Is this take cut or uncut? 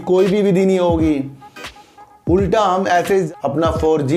cut